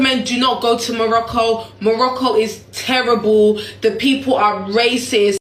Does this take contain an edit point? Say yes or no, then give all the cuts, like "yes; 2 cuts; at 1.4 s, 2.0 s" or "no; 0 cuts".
no; 0 cuts